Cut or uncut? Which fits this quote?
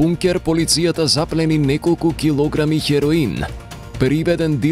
uncut